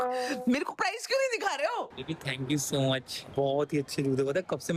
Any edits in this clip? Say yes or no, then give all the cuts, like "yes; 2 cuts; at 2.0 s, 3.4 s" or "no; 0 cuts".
yes; 2 cuts; at 2.0 s, 3.2 s